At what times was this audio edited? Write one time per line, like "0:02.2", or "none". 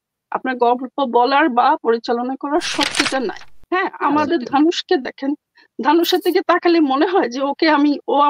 0:03.5